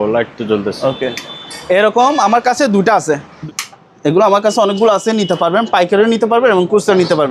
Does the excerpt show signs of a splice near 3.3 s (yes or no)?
yes